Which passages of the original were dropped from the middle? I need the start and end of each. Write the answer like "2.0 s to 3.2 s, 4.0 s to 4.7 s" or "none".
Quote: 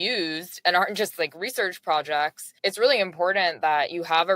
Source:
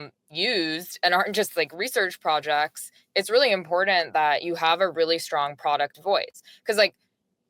2.8 s to 3.0 s

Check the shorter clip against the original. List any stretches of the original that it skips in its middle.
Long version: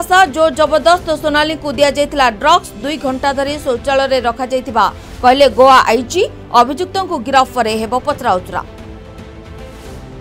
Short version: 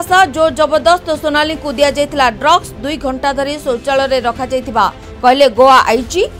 none

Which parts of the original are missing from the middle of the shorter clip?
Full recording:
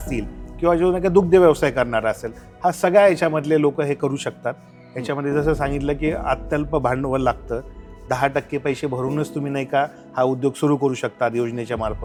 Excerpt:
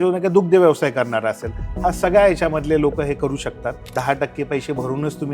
4.6 s to 8.0 s

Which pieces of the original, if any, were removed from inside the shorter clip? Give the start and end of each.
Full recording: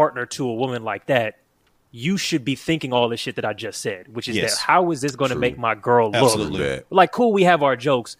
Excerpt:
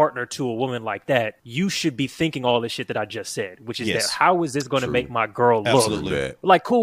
1.4 s to 1.9 s

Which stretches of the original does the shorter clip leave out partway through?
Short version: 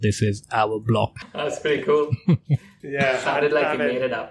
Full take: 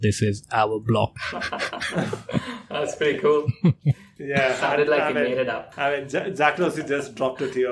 1.2 s to 2.6 s

